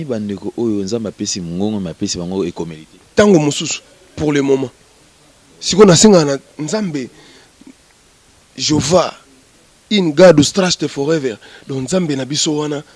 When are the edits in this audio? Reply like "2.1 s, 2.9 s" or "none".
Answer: none